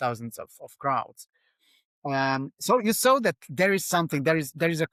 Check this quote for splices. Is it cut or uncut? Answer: uncut